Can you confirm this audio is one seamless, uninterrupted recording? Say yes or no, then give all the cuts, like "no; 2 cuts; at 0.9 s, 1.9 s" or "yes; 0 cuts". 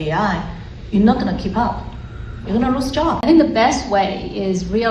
no; 1 cut; at 3.2 s